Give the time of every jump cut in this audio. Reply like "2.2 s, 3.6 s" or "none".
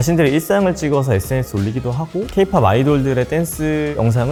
none